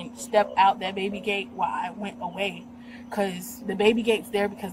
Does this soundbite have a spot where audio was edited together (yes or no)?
no